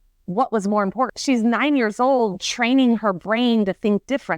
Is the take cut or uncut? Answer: cut